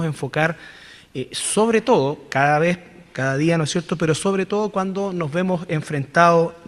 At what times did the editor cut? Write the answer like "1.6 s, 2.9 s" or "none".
2.6 s